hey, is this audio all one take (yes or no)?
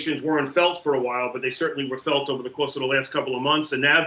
yes